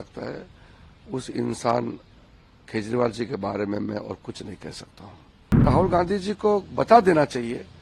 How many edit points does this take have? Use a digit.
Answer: 1